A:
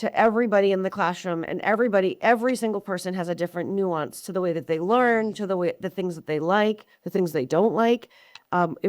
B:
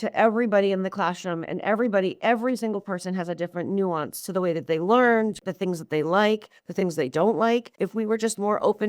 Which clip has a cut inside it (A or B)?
B